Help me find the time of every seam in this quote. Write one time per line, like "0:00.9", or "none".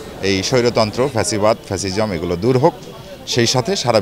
none